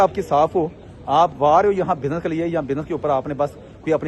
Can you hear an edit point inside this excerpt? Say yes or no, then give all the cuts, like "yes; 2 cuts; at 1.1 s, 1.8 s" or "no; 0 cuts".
no; 0 cuts